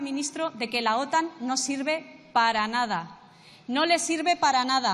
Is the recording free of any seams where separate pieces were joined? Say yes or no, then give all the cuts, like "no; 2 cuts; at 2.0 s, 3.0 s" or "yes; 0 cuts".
yes; 0 cuts